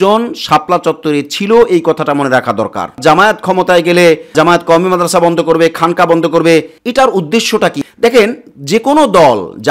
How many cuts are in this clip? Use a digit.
4